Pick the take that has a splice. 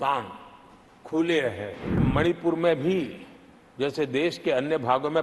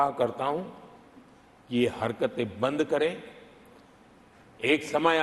first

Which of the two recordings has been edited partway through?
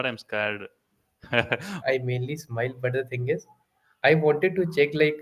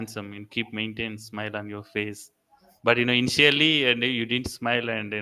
first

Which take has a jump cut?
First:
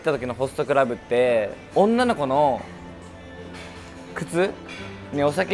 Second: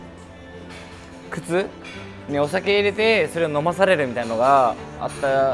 first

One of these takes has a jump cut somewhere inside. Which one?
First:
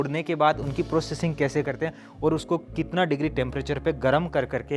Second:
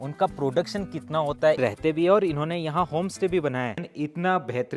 second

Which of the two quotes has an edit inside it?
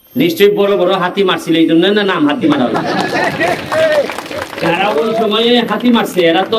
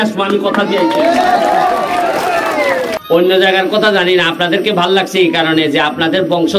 second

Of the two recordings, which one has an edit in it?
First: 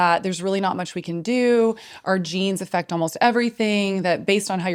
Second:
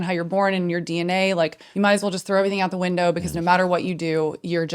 second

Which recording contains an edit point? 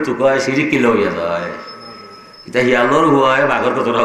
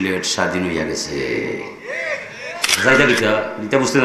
second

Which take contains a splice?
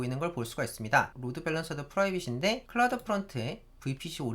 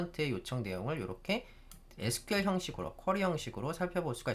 first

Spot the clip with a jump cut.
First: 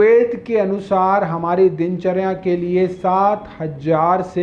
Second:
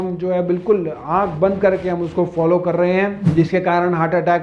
second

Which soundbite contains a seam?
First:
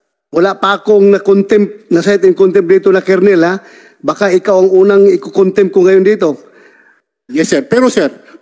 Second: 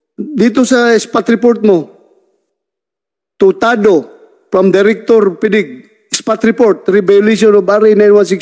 first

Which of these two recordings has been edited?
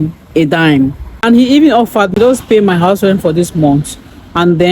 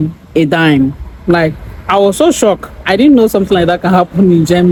first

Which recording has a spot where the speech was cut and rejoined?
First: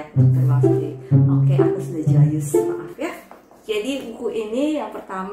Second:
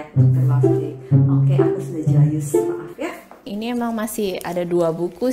second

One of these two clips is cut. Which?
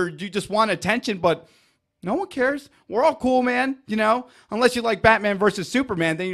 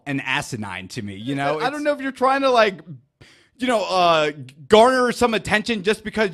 second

